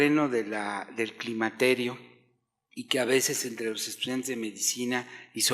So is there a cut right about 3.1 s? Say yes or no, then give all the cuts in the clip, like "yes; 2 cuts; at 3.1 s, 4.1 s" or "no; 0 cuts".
yes; 1 cut; at 3.1 s